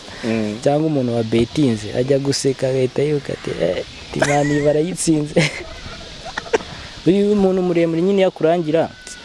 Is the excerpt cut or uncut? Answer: cut